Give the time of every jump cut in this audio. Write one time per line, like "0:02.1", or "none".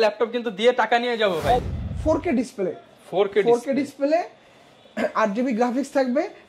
0:01.6